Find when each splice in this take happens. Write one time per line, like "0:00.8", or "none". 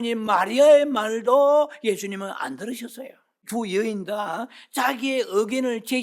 0:03.5